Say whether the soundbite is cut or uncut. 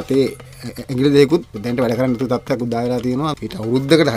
cut